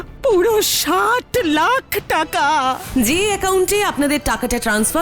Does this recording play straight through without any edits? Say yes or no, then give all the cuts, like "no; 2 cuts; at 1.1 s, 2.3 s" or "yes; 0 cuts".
no; 1 cut; at 2.8 s